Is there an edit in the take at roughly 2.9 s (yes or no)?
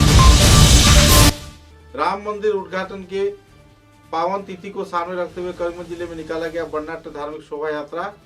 no